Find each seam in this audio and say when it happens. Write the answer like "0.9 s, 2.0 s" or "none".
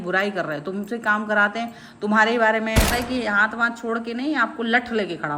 2.9 s